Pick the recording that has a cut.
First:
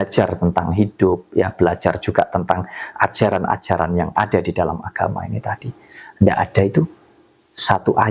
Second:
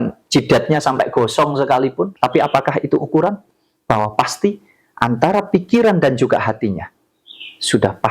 second; 1 cut; at 2.1 s

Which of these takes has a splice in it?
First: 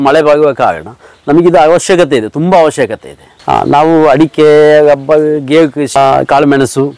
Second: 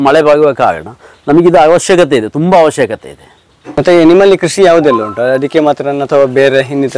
first; 2 cuts; at 3.3 s, 6.0 s

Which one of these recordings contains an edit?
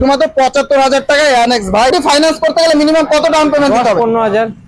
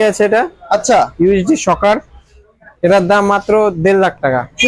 first; 1 cut; at 1.9 s

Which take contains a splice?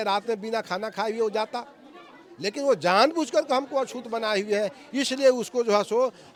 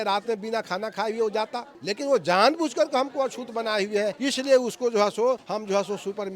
second; 3 cuts; at 1.7 s, 4.2 s, 5.4 s

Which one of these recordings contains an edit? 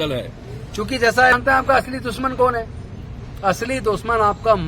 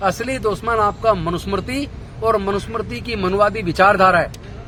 first; 1 cut; at 1.4 s

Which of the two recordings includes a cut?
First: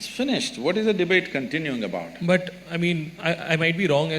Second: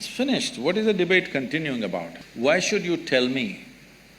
second; 1 cut; at 2.1 s

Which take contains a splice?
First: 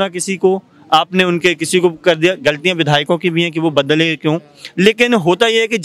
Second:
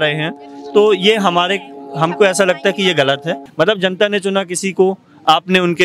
second; 1 cut; at 3.4 s

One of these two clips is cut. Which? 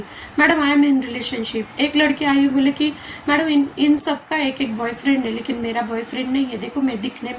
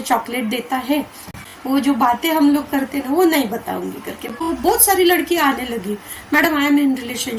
second; 2 cuts; at 1.4 s, 4.4 s

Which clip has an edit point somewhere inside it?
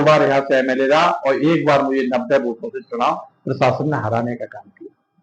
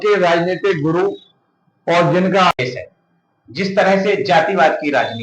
second; 1 cut; at 2.5 s

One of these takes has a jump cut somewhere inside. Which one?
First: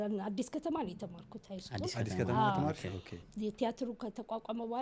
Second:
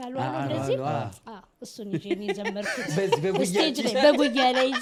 first; 1 cut; at 3.2 s

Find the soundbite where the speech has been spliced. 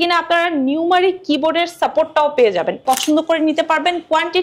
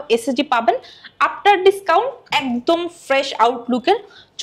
first; 1 cut; at 2.8 s

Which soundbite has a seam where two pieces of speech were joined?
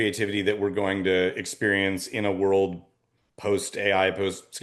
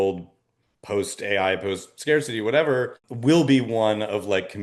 second; 1 cut; at 3.0 s

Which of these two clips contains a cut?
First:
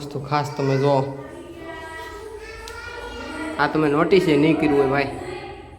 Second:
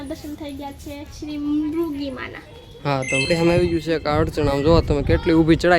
second; 1 cut; at 3.2 s

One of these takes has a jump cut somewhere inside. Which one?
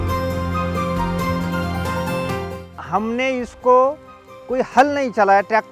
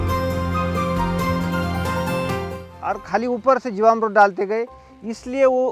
second; 1 cut; at 2.8 s

